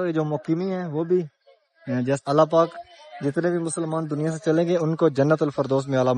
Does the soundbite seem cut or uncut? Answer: cut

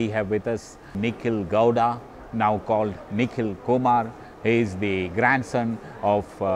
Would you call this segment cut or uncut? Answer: cut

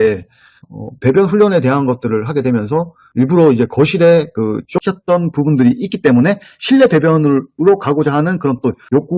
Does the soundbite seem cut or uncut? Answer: cut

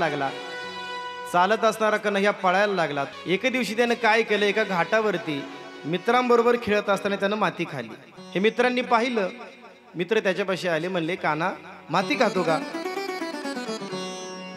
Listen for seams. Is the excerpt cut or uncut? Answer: uncut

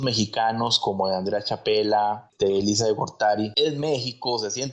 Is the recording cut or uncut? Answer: cut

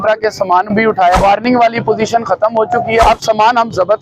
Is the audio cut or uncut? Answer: cut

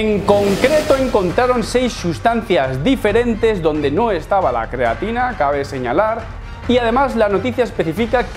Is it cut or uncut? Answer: uncut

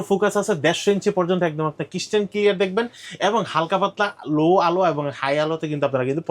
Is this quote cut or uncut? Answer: uncut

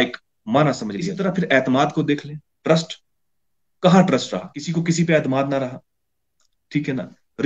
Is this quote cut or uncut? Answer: cut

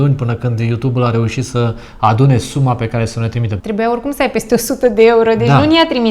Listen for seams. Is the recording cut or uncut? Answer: cut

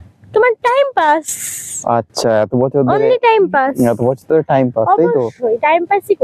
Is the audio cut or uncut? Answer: uncut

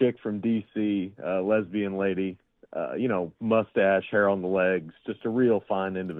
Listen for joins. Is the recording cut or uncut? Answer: uncut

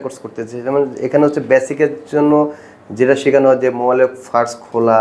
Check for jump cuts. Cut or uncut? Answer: uncut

